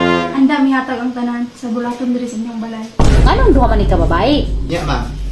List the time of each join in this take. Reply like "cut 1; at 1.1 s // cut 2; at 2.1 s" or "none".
none